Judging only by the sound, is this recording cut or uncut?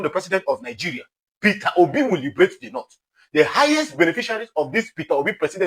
uncut